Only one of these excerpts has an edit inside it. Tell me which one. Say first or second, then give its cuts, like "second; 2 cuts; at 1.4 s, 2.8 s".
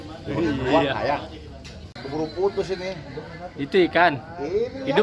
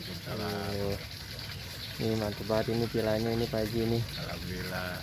first; 1 cut; at 2.0 s